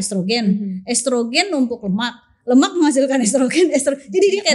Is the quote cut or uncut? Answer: uncut